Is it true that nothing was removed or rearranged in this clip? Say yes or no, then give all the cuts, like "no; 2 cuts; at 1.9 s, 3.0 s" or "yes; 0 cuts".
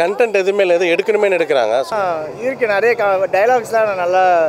no; 1 cut; at 1.9 s